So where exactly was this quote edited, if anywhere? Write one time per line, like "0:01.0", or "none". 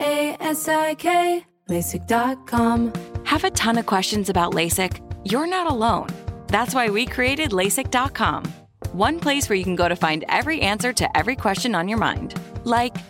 0:02.8